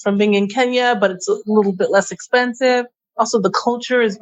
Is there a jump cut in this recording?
yes; 1 cut; at 3.0 s

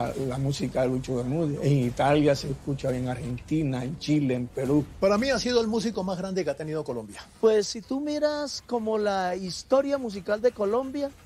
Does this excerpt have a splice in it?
yes; 1 cut; at 4.9 s

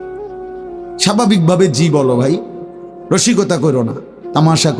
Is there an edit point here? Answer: yes; 1 cut; at 1.0 s

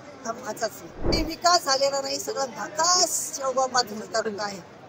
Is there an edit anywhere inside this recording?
yes; 1 cut; at 1.1 s

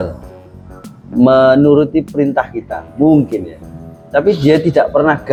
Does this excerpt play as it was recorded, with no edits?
yes; 0 cuts

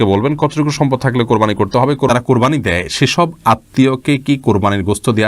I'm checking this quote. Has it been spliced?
yes; 1 cut; at 2.1 s

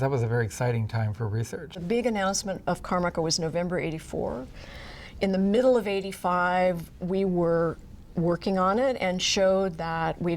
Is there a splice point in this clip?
yes; 1 cut; at 1.8 s

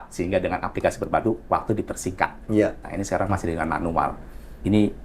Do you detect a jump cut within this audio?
no; 0 cuts

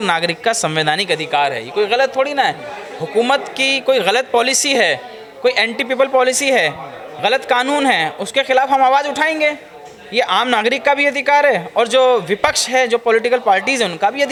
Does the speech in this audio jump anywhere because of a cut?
no; 0 cuts

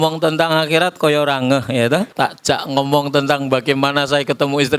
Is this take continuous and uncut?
no; 1 cut; at 2.1 s

